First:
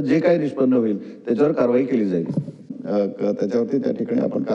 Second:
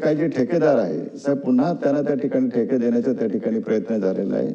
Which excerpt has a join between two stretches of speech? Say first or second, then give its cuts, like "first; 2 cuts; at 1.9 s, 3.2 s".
first; 1 cut; at 2.8 s